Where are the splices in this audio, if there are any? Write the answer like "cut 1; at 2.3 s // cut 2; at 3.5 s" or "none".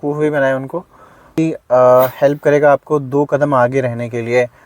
cut 1; at 1.4 s